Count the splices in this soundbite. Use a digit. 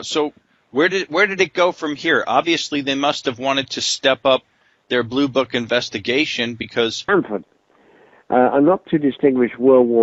0